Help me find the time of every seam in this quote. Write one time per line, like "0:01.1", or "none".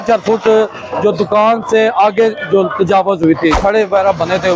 0:03.6

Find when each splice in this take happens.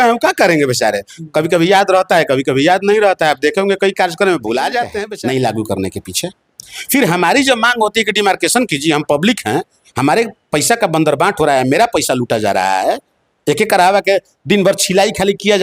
0:05.0

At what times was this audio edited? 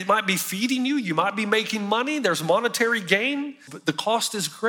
0:03.7

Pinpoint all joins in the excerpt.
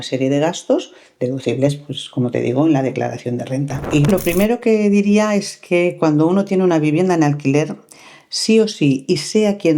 0:04.1

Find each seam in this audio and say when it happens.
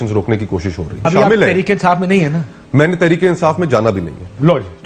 0:01.1

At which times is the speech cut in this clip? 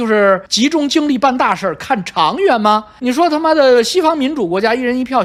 none

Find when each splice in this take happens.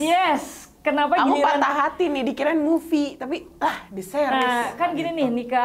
none

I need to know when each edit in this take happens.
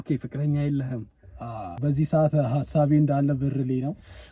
0:01.8

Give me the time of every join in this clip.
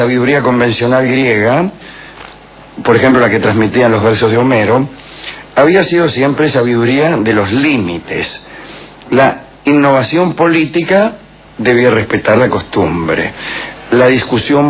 0:01.3

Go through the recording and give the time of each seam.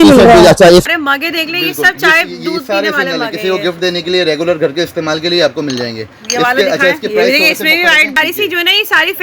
0:00.8
0:08.2

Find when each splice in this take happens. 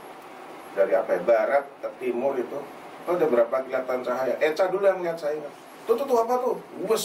none

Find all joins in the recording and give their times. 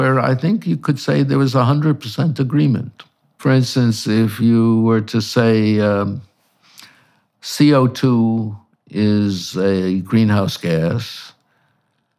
0:03.4

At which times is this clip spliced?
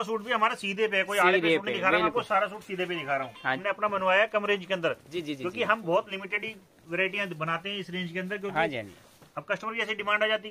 0:03.6

